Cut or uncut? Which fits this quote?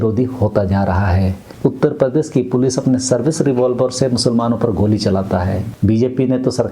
cut